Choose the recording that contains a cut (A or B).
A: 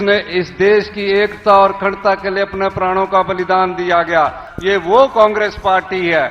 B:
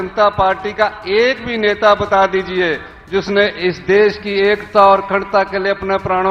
A